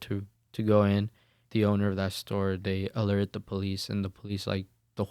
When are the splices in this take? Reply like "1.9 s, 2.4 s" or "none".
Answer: 1.3 s